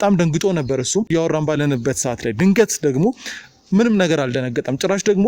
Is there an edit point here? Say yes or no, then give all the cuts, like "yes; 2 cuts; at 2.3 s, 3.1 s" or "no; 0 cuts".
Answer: yes; 1 cut; at 1.1 s